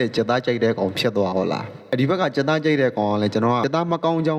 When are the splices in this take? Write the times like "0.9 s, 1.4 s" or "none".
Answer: 1.7 s, 3.6 s